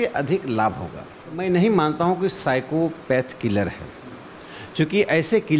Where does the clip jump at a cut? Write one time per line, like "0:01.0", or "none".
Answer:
0:01.4